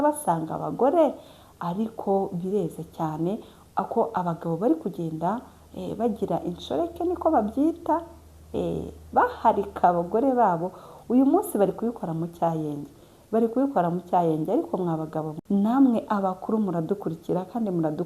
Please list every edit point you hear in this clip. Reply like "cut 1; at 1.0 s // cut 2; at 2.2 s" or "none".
cut 1; at 15.3 s